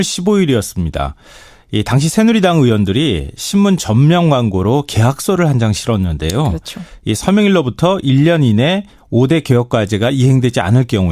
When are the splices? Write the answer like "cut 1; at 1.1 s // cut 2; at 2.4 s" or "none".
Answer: cut 1; at 1.4 s